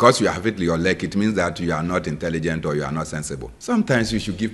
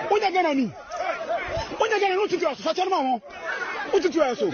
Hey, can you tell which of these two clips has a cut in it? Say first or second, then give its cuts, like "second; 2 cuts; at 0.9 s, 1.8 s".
first; 1 cut; at 3.5 s